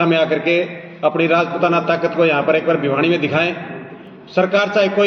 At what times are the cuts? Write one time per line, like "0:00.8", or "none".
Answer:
none